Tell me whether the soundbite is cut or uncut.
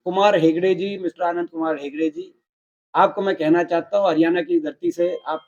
uncut